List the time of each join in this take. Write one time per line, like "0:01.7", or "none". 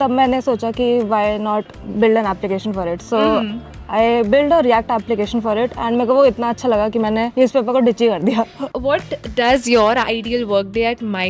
0:08.7